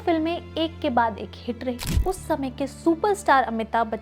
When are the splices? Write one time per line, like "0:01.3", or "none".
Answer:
0:02.0

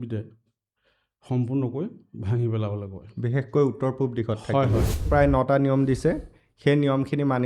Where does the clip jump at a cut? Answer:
0:05.0

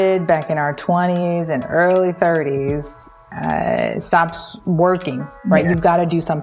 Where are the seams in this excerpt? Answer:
0:05.3

